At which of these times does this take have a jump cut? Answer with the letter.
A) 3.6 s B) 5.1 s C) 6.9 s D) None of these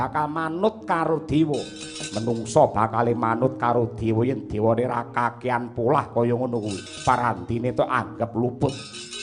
C